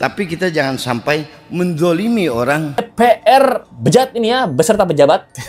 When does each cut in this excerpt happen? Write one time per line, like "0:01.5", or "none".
0:02.9